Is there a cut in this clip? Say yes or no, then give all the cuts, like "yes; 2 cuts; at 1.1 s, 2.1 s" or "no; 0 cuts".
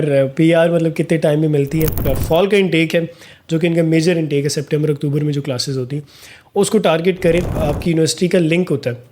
yes; 2 cuts; at 2.1 s, 7.6 s